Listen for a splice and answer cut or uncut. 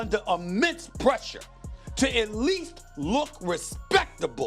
uncut